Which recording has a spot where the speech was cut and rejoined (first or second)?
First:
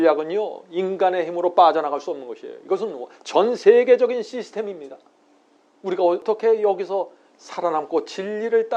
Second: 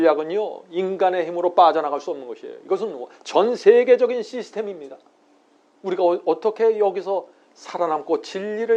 first